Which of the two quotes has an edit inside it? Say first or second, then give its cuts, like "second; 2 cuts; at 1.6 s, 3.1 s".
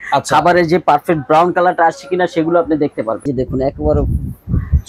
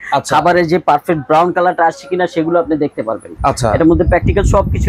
first; 1 cut; at 3.3 s